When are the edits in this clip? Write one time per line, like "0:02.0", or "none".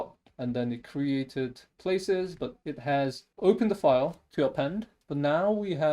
0:02.6
0:04.9